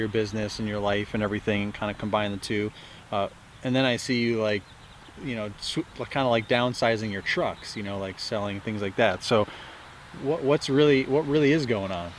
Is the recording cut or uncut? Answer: uncut